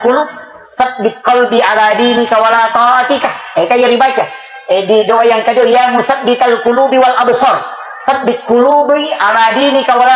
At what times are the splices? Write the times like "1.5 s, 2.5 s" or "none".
none